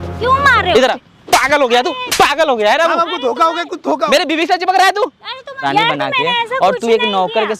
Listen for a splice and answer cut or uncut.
cut